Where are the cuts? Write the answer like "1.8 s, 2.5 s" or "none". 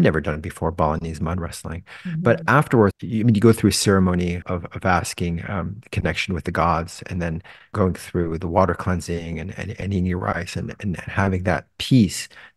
2.9 s, 4.4 s, 7.7 s